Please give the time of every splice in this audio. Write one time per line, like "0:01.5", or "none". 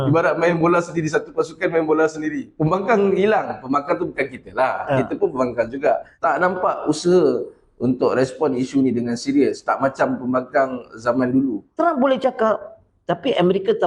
0:02.4
0:06.1
0:11.6